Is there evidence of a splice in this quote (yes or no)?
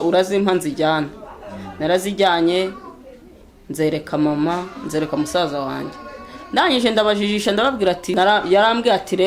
yes